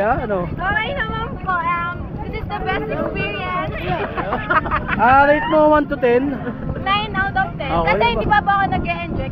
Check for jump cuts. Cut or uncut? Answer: uncut